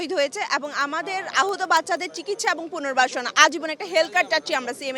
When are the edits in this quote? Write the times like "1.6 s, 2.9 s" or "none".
none

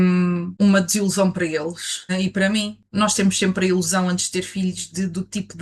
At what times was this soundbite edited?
none

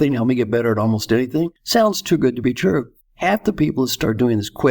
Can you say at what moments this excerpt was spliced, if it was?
1.6 s, 3.0 s

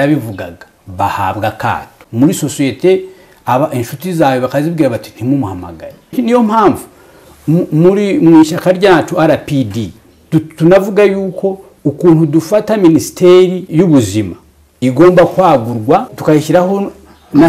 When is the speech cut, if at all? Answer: 2.0 s, 6.1 s, 13.6 s, 16.1 s

